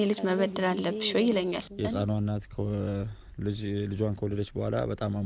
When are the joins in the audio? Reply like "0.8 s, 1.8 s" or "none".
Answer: 1.7 s